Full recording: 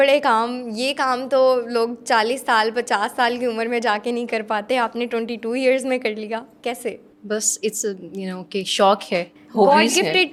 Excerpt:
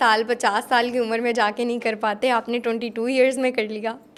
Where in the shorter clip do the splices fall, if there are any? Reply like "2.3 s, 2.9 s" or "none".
none